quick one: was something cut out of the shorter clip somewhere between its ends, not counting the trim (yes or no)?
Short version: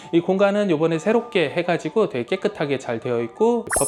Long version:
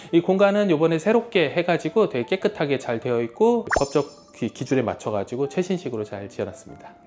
no